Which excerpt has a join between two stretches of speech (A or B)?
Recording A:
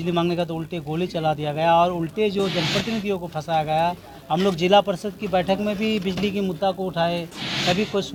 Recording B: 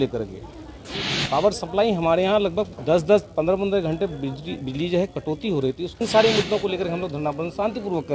B